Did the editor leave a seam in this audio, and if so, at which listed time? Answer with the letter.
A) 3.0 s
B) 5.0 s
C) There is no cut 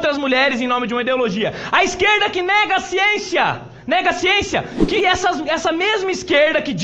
B